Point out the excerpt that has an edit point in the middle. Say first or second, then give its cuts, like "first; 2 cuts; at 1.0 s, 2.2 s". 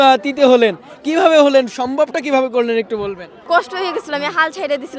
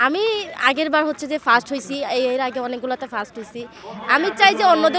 first; 1 cut; at 3.3 s